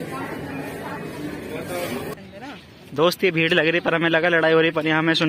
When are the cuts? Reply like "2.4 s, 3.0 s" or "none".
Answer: 2.1 s